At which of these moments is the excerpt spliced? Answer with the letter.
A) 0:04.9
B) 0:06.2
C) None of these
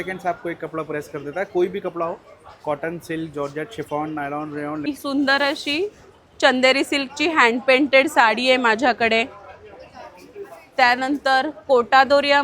A